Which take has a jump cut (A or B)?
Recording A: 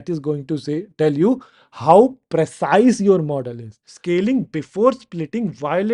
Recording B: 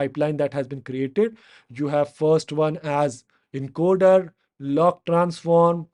A